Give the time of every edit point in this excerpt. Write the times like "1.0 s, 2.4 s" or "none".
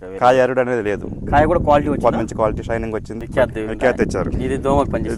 3.2 s